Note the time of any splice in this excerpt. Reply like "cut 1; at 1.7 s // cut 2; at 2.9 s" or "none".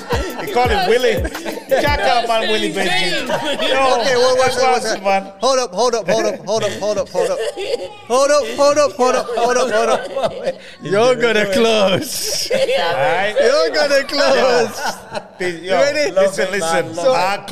none

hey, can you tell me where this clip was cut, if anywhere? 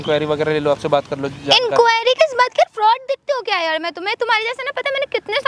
none

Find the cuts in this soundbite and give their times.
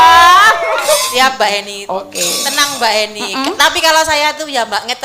cut 1; at 1.1 s

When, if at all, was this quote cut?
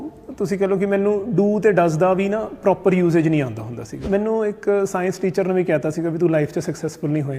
cut 1; at 4.0 s

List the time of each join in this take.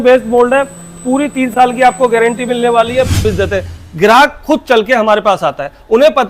cut 1; at 3.3 s

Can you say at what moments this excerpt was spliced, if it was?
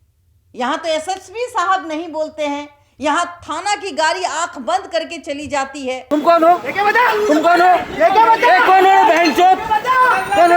cut 1; at 6.0 s

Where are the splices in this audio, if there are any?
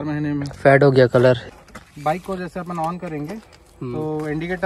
cut 1; at 1.5 s

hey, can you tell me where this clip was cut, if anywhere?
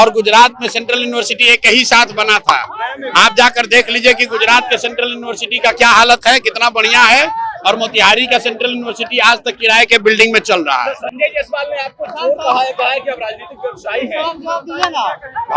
none

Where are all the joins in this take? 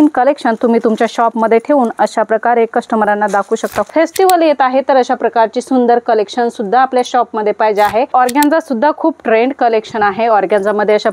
cut 1; at 3.9 s // cut 2; at 8.1 s

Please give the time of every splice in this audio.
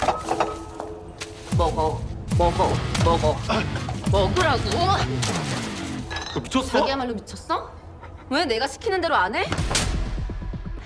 cut 1; at 6.9 s // cut 2; at 9.6 s

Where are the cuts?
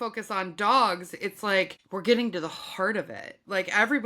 cut 1; at 1.8 s

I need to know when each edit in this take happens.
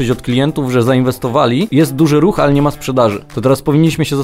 cut 1; at 1.7 s // cut 2; at 3.3 s

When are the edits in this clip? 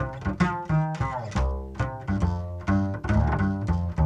none

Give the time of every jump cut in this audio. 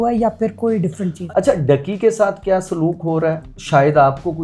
cut 1; at 1.1 s // cut 2; at 3.5 s

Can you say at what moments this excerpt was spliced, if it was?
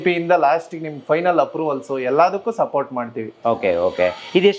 none

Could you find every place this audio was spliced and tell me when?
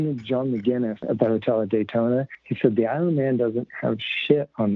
cut 1; at 1.0 s // cut 2; at 2.4 s

